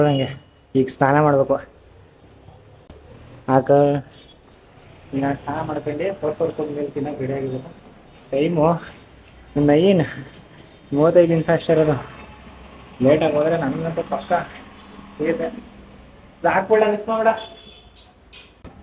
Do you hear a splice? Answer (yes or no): no